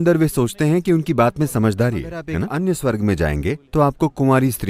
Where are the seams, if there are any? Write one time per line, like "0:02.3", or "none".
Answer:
0:02.4